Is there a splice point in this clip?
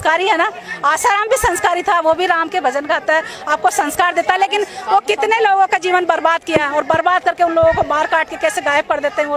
no; 0 cuts

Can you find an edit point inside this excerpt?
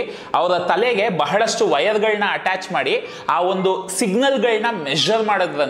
no; 0 cuts

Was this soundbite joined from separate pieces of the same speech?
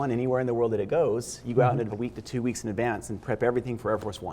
yes; 1 cut; at 1.9 s

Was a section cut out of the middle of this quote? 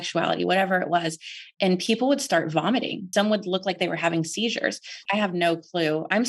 yes; 2 cuts; at 3.0 s, 5.0 s

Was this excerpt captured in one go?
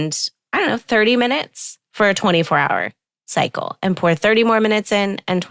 yes; 0 cuts

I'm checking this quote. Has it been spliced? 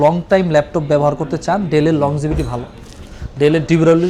no; 0 cuts

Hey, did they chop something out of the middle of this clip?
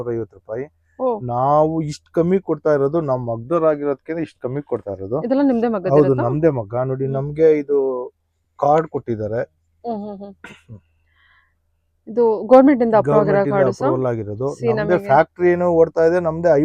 no; 0 cuts

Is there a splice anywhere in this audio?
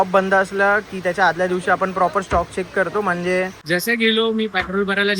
yes; 1 cut; at 3.6 s

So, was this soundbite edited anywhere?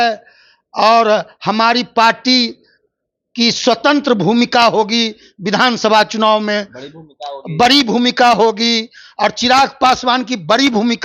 no; 0 cuts

